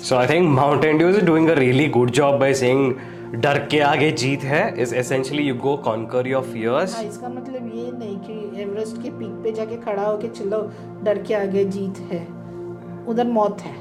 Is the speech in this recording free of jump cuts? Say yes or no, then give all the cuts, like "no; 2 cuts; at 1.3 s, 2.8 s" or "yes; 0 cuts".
yes; 0 cuts